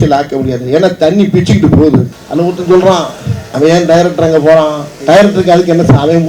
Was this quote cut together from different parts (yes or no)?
yes